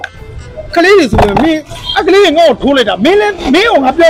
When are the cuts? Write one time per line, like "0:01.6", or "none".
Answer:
none

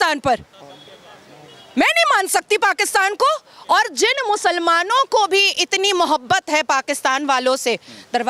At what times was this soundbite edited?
none

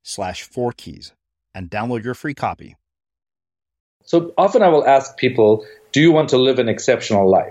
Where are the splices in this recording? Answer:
0:04.0

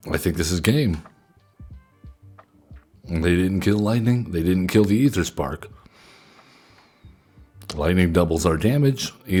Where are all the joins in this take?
none

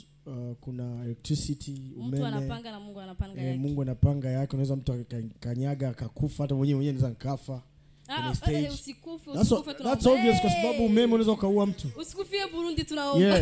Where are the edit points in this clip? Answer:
none

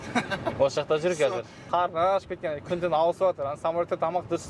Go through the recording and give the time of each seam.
0:01.6

